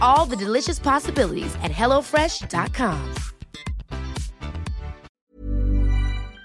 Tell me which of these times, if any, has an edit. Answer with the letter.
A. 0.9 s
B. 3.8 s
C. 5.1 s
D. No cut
C